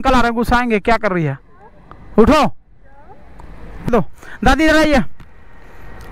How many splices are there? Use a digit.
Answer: 1